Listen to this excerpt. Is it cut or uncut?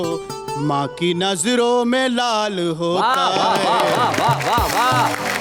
uncut